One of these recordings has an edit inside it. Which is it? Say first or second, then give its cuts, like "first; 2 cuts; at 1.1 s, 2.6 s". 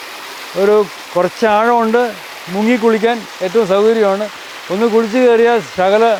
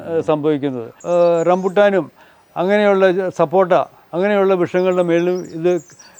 second; 1 cut; at 0.9 s